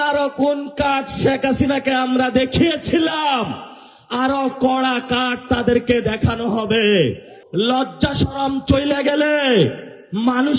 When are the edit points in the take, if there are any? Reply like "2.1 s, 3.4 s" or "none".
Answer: 7.3 s

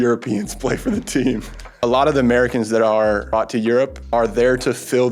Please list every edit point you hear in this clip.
1.6 s, 3.3 s, 4.0 s

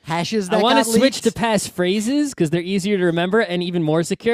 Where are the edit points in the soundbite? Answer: none

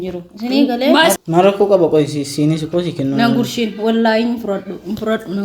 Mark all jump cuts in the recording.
1.1 s

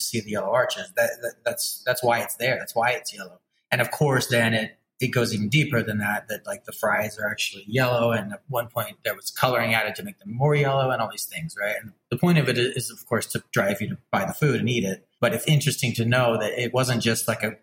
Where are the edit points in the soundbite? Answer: 12.0 s, 14.0 s, 15.0 s, 16.7 s

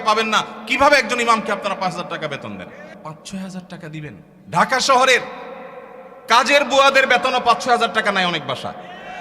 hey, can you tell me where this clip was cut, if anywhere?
2.9 s, 4.3 s

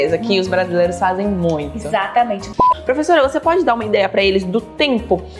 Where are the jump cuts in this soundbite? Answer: 2.6 s

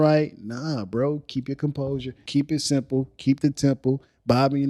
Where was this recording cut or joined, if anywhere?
2.2 s

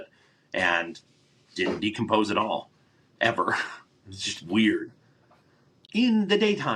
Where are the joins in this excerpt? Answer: 5.8 s

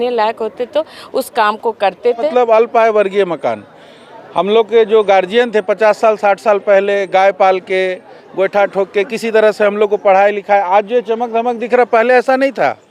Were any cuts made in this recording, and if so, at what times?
2.3 s

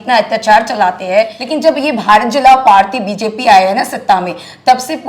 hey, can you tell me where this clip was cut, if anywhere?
1.4 s

